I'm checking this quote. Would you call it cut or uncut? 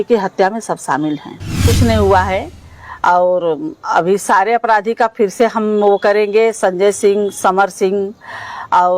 cut